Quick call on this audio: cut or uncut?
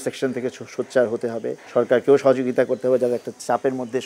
cut